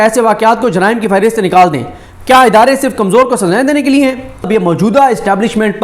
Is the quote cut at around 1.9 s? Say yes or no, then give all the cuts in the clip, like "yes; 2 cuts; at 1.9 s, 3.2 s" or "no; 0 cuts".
no; 1 cut; at 4.5 s